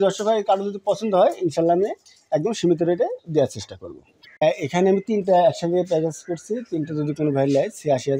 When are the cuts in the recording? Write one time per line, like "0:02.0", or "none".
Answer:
0:04.4